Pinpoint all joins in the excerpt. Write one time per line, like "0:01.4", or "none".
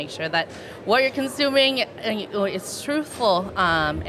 none